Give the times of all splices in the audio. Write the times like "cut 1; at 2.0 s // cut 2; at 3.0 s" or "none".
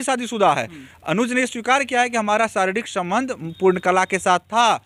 none